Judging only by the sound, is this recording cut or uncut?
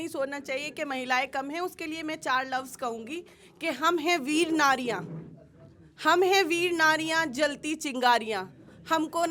uncut